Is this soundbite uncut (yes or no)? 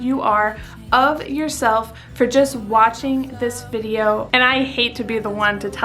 no